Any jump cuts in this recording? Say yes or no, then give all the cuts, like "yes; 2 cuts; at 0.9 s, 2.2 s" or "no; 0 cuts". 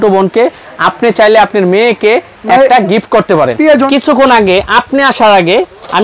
yes; 1 cut; at 3.9 s